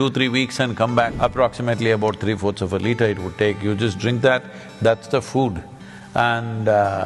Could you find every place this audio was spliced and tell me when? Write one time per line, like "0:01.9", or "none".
0:01.1